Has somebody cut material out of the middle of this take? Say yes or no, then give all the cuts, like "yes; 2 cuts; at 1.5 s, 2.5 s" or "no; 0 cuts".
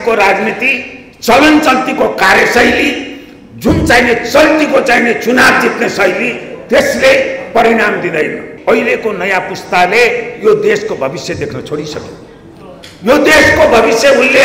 yes; 1 cut; at 8.5 s